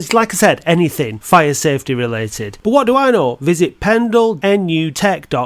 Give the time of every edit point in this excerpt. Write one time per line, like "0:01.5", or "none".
0:04.4